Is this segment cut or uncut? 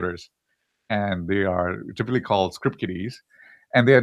cut